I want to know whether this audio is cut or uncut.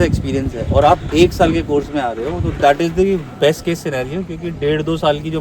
uncut